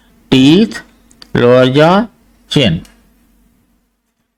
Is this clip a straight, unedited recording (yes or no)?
yes